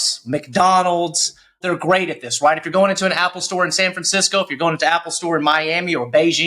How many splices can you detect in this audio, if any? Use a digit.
1